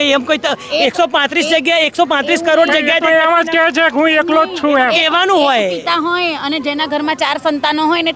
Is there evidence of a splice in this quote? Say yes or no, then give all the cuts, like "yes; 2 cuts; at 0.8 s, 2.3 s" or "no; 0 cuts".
no; 0 cuts